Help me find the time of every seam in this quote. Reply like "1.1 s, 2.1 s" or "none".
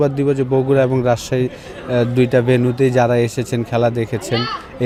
none